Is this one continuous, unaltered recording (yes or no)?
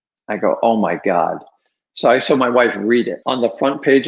no